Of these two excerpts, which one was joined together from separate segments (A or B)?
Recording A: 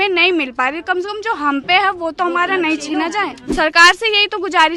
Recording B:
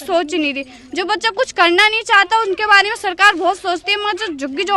A